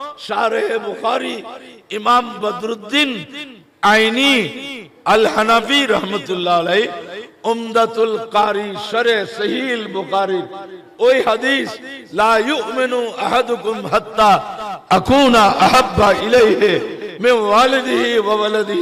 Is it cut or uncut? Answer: uncut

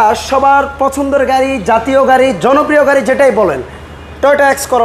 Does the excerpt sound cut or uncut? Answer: uncut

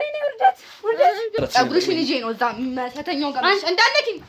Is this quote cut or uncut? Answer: cut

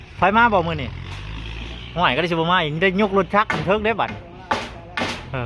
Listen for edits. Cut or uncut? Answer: uncut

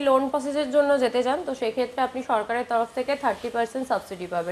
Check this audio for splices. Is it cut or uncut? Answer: uncut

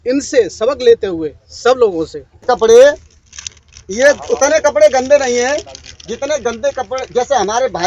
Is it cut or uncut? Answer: cut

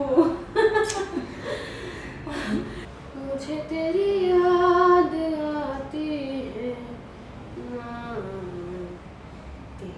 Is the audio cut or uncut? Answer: cut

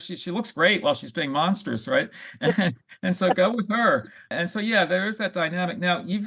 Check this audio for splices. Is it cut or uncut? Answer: cut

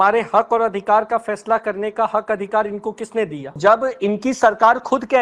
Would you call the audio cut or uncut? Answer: cut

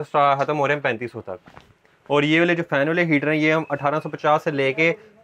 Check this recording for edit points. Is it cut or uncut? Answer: uncut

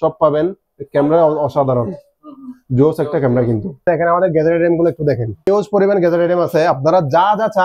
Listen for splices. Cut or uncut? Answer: cut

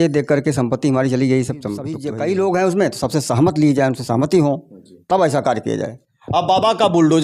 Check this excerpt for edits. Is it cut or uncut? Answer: cut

